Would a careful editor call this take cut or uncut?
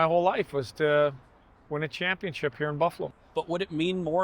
cut